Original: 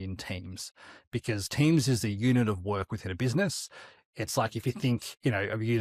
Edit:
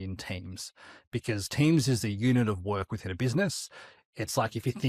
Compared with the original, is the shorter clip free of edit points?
yes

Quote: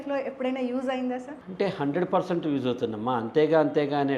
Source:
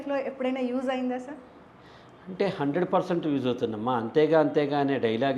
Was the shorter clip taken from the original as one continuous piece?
no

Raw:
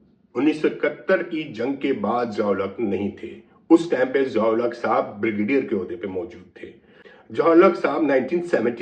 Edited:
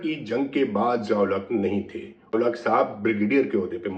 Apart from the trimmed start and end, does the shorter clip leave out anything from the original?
yes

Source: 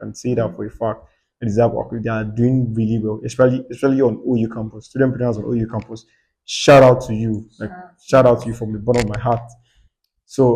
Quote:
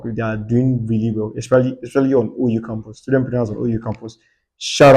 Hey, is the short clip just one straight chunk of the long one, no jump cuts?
yes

